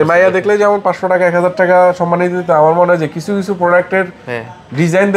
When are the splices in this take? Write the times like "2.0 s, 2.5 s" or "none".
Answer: none